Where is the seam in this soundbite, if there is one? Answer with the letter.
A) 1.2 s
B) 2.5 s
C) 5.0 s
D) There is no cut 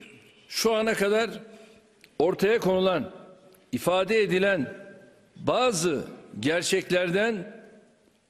D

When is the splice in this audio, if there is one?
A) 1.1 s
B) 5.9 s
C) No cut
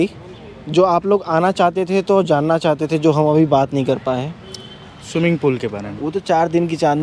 B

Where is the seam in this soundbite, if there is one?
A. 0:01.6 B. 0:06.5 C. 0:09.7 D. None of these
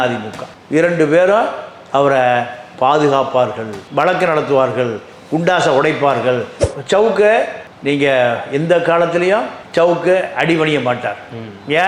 B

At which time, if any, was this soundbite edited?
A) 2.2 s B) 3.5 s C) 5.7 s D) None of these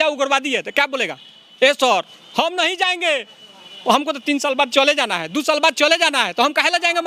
D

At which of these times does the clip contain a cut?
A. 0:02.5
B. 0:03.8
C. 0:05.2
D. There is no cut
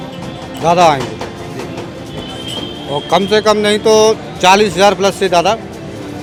D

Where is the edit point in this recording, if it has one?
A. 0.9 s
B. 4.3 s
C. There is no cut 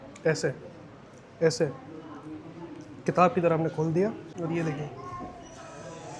B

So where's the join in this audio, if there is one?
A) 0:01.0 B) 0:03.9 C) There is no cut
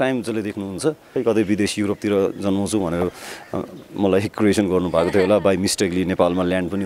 A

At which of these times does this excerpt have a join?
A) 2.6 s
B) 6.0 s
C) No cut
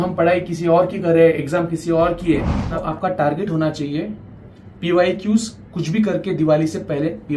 A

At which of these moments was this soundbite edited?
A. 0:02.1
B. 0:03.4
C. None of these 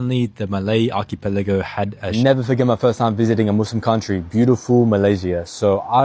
A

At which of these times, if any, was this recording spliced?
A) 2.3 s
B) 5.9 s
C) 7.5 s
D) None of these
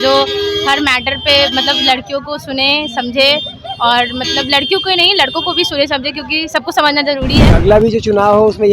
C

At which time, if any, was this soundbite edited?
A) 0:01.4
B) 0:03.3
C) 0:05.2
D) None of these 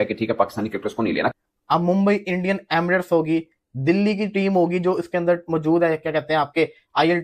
A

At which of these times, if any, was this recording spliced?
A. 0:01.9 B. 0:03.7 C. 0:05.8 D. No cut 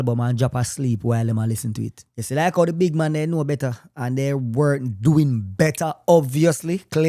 A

